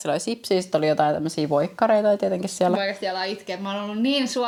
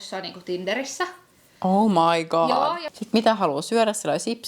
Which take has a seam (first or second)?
second